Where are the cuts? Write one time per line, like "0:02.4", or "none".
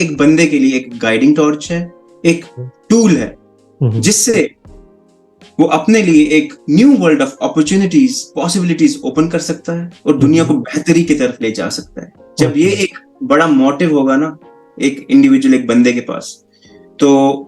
none